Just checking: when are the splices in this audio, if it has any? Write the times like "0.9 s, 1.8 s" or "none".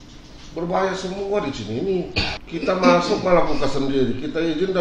2.4 s